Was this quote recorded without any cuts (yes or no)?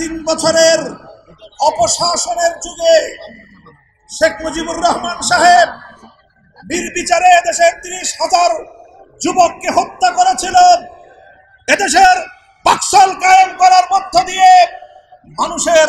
yes